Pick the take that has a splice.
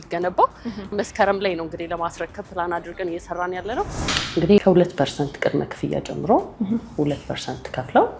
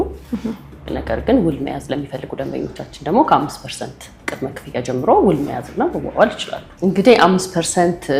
first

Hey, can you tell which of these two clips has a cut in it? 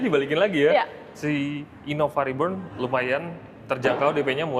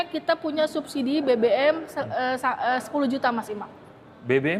first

